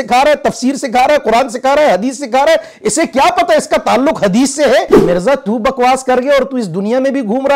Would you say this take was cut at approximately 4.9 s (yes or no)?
yes